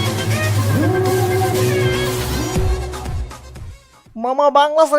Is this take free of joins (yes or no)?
yes